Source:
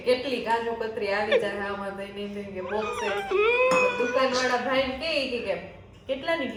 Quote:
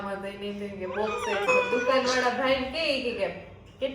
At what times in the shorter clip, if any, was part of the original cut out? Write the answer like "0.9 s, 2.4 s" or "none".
1.5 s

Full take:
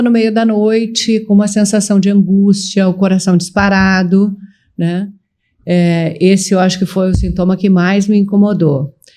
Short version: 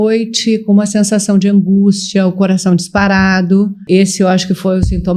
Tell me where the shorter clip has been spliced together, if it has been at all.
3.8 s

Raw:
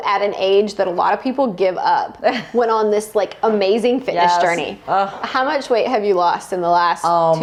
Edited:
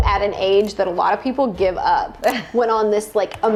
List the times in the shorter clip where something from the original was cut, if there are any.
none

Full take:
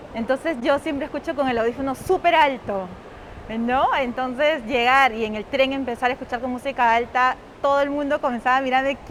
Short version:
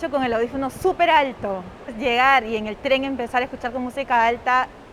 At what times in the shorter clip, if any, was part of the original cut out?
1.9 s

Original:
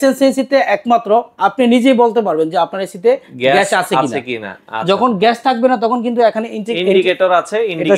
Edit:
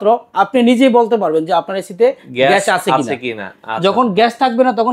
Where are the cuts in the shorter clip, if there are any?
none

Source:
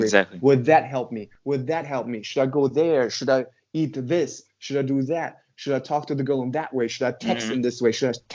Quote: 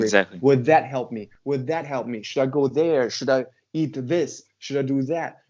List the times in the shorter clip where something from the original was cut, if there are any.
none

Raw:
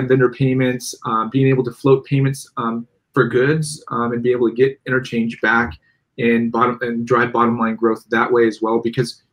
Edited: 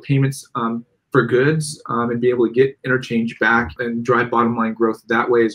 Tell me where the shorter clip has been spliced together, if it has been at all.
3.8 s

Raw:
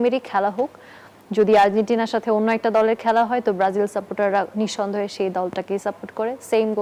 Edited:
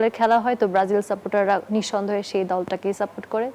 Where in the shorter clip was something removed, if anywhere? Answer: none

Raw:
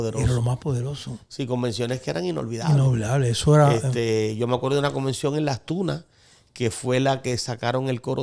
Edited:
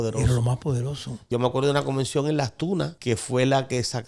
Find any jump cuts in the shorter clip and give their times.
1.3 s, 3.0 s

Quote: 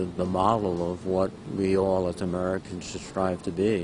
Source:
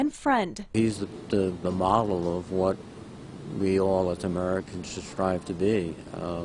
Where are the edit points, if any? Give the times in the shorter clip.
1.4 s

